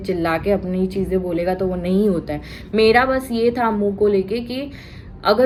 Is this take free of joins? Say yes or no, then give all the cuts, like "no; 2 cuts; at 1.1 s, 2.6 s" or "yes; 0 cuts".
yes; 0 cuts